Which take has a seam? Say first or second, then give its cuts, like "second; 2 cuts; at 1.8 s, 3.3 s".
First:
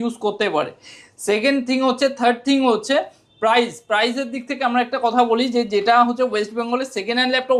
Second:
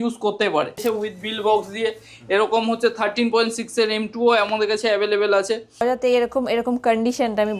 second; 2 cuts; at 0.8 s, 5.8 s